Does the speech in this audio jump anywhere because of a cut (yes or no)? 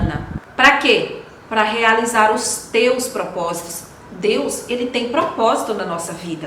no